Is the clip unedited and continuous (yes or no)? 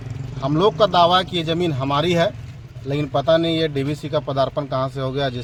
yes